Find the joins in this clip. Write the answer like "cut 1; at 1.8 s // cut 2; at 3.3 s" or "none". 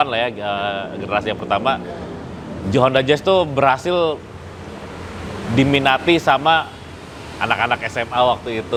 none

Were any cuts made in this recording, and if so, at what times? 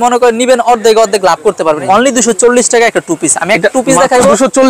cut 1; at 1.8 s

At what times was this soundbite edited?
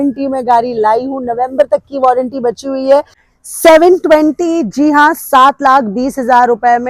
cut 1; at 3.2 s

